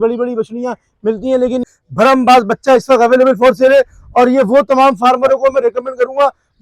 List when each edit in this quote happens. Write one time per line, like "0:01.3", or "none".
0:01.6

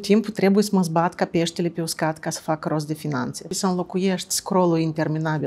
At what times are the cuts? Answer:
0:03.5

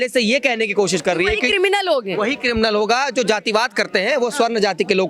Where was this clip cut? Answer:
none

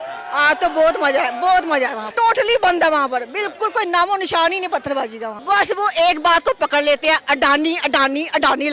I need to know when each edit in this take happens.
0:02.1
0:05.3

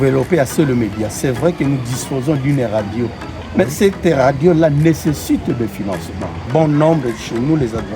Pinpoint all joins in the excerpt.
0:06.4

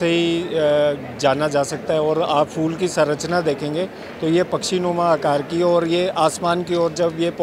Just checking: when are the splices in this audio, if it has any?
none

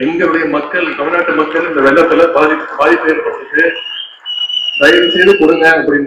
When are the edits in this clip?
none

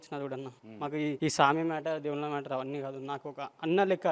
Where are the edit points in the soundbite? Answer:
0:01.0

